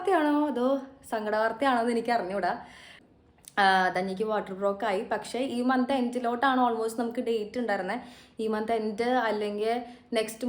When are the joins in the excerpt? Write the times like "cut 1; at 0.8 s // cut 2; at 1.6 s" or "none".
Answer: cut 1; at 3.0 s